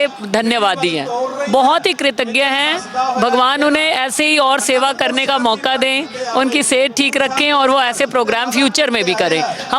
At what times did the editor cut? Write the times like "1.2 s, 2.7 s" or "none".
none